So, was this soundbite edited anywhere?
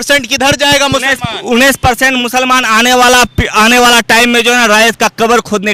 no; 0 cuts

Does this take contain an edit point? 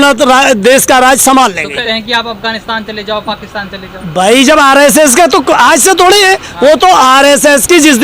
yes; 1 cut; at 1.8 s

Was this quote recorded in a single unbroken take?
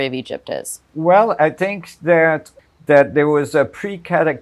no; 1 cut; at 2.5 s

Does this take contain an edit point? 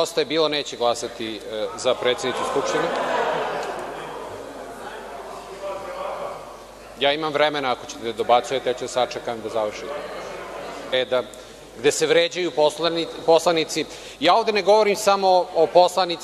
no; 0 cuts

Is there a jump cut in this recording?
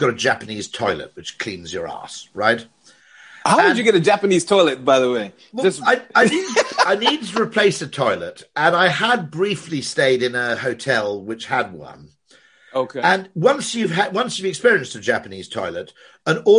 no; 0 cuts

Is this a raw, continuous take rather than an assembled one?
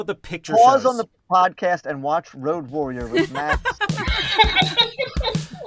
yes; 0 cuts

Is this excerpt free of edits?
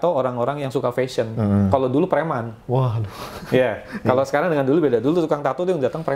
yes; 0 cuts

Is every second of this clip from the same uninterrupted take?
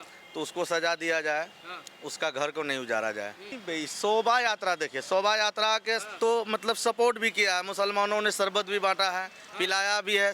no; 1 cut; at 3.6 s

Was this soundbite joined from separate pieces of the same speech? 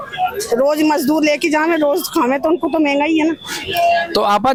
no; 0 cuts

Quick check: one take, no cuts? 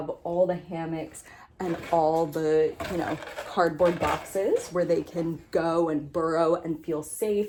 yes; 0 cuts

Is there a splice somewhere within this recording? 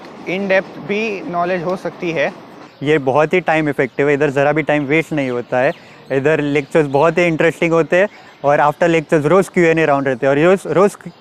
yes; 1 cut; at 2.7 s

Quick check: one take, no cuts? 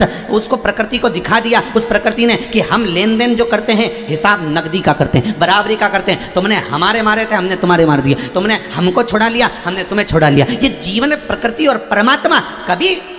yes; 0 cuts

